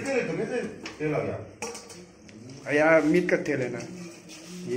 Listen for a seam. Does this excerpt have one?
no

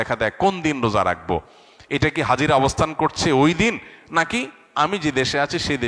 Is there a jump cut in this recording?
no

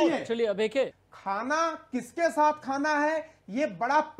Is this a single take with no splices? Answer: no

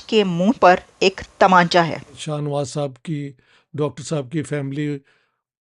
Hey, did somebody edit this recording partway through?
yes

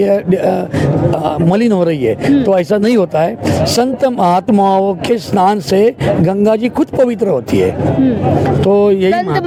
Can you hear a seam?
no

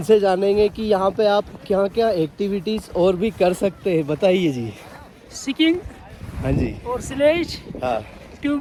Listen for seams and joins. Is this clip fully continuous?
yes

